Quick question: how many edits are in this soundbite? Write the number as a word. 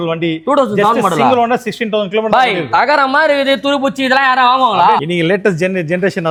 zero